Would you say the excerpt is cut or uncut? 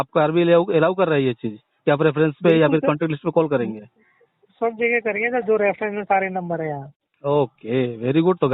uncut